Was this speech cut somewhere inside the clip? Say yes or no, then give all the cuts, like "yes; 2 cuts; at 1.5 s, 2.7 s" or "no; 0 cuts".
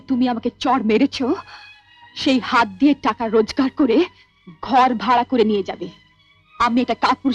no; 0 cuts